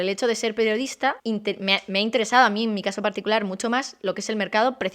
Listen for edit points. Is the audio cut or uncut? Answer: cut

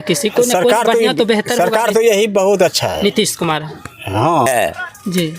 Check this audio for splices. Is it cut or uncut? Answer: cut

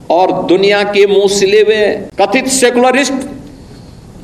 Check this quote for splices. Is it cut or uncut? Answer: cut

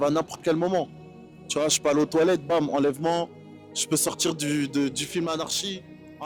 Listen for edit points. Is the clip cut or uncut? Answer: uncut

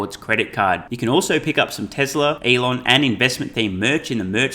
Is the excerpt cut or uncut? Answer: cut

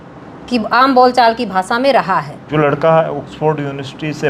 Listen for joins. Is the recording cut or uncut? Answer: cut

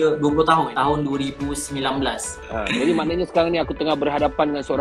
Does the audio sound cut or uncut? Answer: uncut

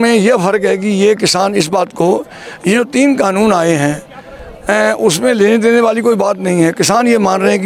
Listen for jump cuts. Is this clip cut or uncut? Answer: uncut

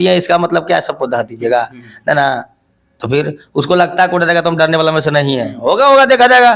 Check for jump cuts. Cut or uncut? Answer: uncut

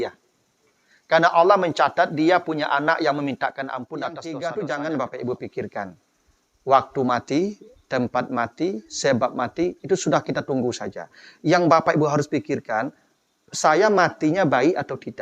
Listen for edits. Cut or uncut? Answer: cut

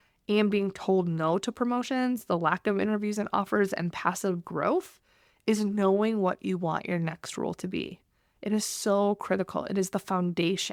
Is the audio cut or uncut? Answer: uncut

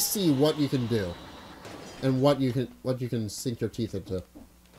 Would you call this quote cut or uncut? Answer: uncut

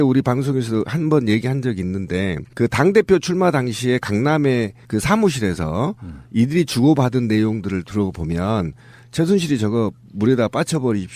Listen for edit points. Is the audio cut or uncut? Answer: cut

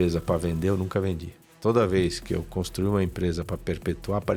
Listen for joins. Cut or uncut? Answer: uncut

